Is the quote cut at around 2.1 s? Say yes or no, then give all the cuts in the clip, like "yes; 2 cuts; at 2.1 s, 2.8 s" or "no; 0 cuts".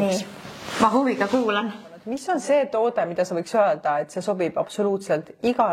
yes; 1 cut; at 2.1 s